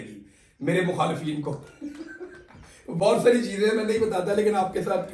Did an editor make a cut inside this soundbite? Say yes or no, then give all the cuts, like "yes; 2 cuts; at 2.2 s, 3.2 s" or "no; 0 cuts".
no; 0 cuts